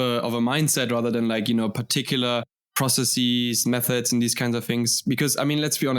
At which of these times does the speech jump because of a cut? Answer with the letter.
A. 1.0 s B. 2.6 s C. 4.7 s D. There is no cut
B